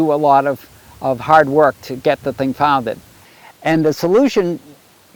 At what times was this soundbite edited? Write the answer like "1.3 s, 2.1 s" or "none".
3.1 s